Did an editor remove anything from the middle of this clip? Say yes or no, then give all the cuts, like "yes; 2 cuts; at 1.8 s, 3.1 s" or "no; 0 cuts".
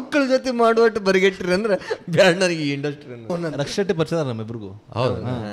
yes; 1 cut; at 3.3 s